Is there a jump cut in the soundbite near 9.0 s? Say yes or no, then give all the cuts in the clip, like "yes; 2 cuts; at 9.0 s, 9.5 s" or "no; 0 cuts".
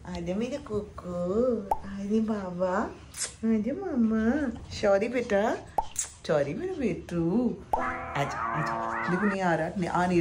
yes; 1 cut; at 9.0 s